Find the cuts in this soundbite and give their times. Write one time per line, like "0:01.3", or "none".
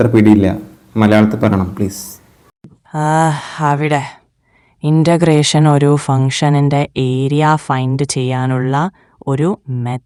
none